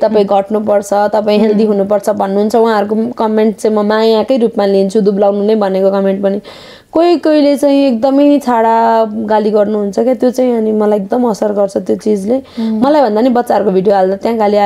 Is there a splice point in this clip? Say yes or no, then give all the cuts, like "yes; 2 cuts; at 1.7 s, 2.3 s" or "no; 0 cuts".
no; 0 cuts